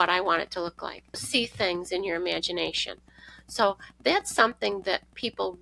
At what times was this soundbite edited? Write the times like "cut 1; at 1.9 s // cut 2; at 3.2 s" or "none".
cut 1; at 1.2 s

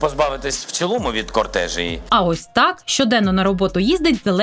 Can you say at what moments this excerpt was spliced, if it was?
cut 1; at 2.0 s

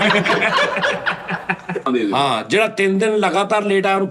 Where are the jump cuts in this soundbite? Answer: cut 1; at 1.9 s

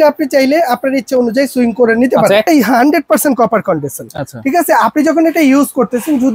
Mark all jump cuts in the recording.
cut 1; at 2.5 s

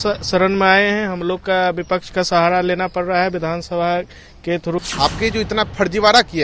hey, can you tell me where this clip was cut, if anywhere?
cut 1; at 4.8 s

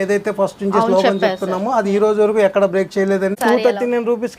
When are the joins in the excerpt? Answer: cut 1; at 3.4 s

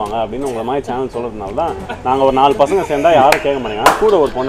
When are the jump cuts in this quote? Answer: none

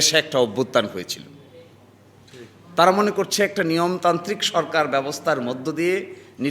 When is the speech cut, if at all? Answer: none

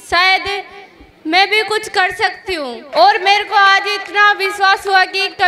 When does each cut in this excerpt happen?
cut 1; at 2.8 s

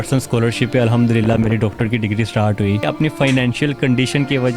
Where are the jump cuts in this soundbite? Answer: cut 1; at 2.8 s

